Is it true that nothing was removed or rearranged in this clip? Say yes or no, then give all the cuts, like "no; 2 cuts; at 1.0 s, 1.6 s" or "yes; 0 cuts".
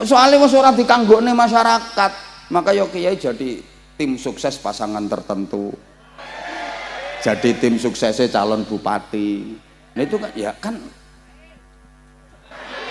yes; 0 cuts